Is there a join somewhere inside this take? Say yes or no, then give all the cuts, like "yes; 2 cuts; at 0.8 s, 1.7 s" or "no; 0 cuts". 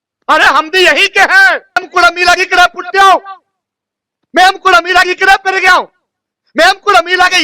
yes; 1 cut; at 1.8 s